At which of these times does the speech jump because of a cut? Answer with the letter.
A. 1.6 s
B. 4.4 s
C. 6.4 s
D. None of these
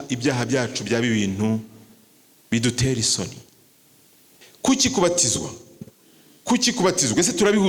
B